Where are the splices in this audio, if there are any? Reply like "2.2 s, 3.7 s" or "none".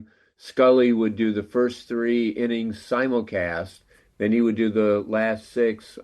none